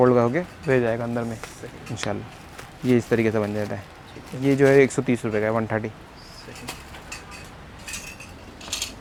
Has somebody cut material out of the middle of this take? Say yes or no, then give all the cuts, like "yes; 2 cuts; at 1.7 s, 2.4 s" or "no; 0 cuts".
no; 0 cuts